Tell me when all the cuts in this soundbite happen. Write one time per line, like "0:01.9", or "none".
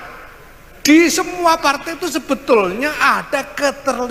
none